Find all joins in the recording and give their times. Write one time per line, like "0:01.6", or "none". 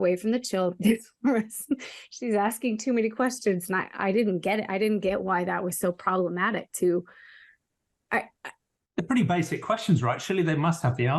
none